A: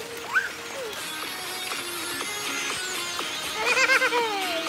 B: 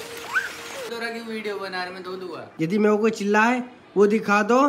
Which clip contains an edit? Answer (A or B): B